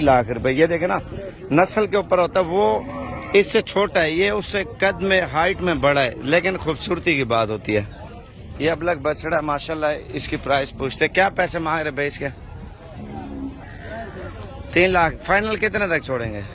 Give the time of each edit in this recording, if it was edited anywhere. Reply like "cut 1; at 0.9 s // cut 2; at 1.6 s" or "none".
none